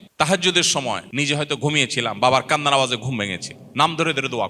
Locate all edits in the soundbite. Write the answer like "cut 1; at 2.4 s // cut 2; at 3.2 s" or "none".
cut 1; at 1.1 s